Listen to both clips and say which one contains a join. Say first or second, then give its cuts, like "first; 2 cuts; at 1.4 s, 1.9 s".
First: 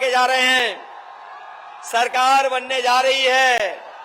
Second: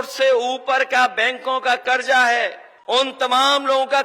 second; 1 cut; at 2.7 s